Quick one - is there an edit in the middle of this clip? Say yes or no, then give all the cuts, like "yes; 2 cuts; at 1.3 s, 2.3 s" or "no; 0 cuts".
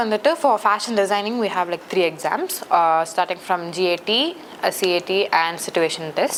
no; 0 cuts